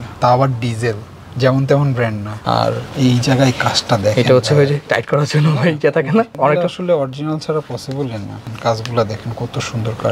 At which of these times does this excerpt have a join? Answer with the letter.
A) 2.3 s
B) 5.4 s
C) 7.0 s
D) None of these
A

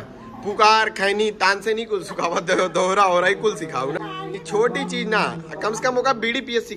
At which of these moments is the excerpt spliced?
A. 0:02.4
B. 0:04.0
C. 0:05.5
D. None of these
B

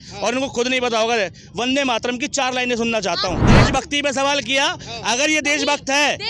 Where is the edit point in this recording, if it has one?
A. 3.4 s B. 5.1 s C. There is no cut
A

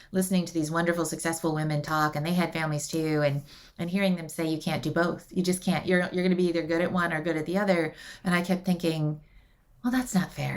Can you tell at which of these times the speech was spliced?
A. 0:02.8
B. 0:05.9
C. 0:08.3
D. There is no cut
B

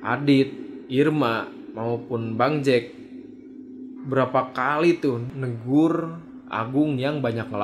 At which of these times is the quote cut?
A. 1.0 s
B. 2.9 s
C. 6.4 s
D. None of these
D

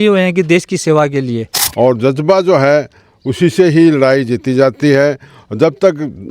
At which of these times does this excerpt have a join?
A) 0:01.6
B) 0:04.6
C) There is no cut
A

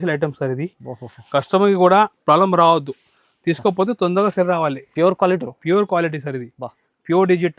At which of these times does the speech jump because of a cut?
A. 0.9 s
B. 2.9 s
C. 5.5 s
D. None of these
D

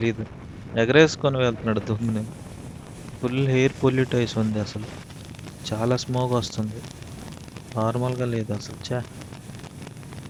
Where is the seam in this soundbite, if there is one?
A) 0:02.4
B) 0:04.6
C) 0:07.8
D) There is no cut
D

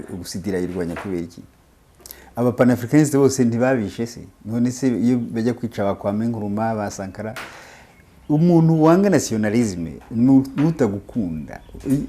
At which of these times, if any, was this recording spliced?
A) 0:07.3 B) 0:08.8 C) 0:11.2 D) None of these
D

